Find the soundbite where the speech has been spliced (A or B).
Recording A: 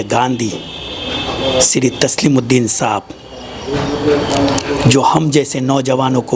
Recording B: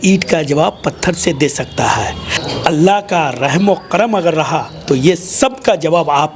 B